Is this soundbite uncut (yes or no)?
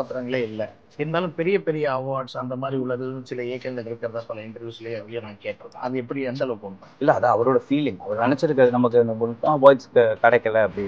yes